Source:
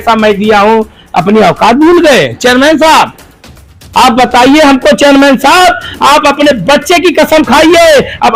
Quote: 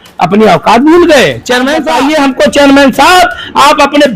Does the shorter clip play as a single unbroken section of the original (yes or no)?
no